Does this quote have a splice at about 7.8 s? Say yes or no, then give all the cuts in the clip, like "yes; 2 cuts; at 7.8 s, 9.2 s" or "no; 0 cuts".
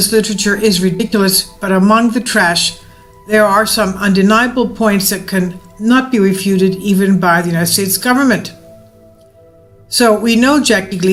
no; 0 cuts